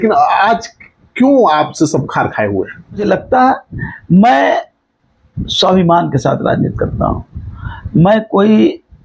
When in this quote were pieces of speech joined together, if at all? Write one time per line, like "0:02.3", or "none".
0:03.0